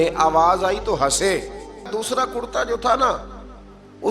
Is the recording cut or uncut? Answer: cut